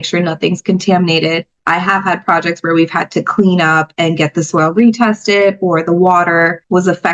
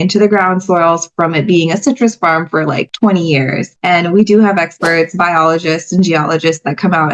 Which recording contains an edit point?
second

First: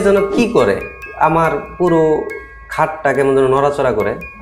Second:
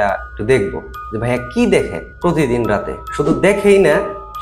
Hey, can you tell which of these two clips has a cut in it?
second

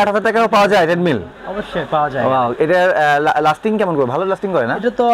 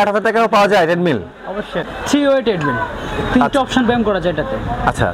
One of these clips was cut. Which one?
second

